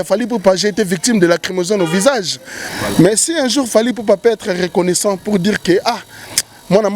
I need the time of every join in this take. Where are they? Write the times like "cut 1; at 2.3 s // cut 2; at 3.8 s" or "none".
cut 1; at 2.7 s